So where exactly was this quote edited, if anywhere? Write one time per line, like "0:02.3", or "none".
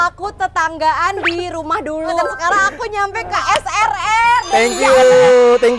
0:02.2